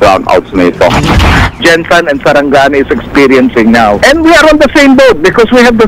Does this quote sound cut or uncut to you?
cut